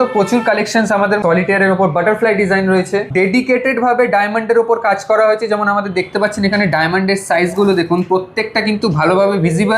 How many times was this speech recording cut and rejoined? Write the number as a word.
two